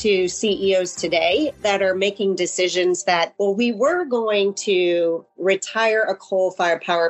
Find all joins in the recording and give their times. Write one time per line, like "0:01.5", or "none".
0:03.3